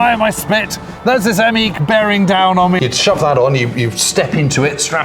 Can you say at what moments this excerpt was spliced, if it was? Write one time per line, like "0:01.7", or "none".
0:02.8

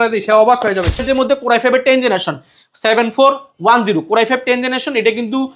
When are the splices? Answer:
0:01.0

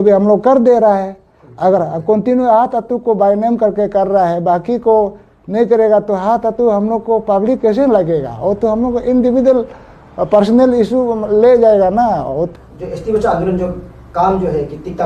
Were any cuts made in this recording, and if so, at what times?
0:12.5

